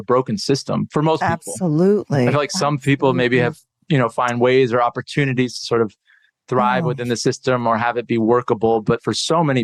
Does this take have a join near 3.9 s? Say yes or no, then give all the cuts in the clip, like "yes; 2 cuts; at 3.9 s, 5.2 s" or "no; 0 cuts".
no; 0 cuts